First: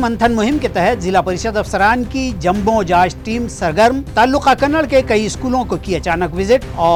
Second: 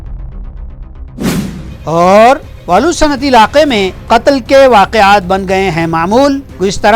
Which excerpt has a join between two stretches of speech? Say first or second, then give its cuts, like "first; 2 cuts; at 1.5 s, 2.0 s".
second; 1 cut; at 1.2 s